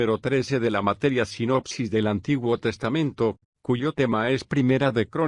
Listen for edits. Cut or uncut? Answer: uncut